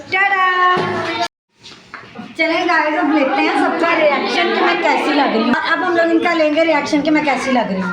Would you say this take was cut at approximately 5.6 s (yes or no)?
yes